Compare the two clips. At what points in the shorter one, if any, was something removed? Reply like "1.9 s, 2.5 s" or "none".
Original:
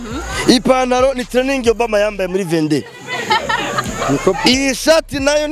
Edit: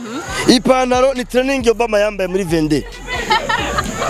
none